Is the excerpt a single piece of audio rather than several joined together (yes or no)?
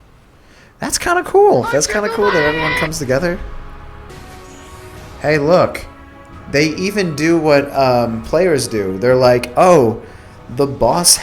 no